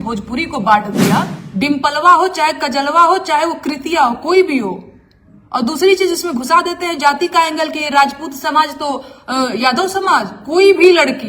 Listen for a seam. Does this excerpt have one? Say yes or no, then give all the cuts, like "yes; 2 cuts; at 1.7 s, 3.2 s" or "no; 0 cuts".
yes; 1 cut; at 1.4 s